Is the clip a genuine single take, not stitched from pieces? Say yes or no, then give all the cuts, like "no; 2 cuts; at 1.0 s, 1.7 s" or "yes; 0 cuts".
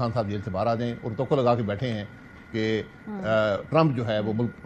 yes; 0 cuts